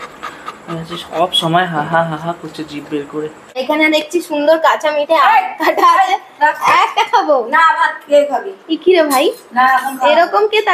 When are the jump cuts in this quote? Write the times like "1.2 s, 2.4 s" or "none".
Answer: 3.6 s